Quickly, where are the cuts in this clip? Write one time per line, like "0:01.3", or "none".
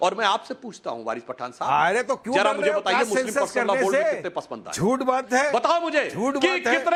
none